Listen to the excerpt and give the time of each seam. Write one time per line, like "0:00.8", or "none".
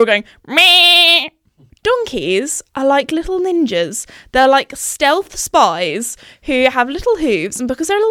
0:01.6